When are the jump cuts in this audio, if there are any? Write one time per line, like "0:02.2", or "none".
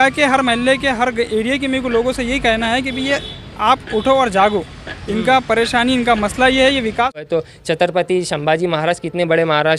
0:07.2